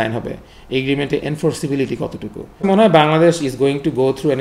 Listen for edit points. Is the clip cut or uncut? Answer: cut